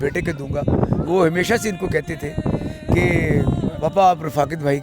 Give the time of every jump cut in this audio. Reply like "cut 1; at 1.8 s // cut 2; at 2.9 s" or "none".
cut 1; at 3.7 s